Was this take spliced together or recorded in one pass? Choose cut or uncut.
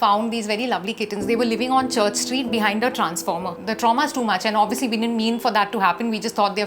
cut